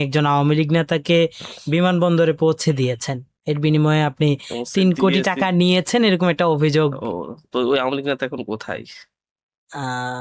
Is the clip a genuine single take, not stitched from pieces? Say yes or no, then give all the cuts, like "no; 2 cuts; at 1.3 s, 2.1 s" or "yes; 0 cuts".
yes; 0 cuts